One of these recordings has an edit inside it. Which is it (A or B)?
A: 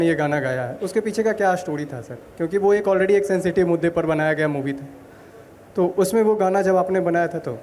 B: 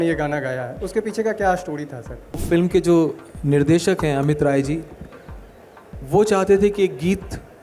B